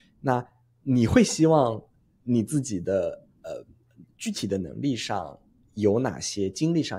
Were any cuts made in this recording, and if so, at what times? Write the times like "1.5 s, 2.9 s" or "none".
none